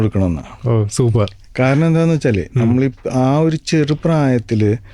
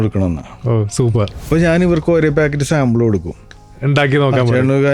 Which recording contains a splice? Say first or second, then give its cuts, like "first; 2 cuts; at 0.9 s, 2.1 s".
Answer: second; 1 cut; at 1.4 s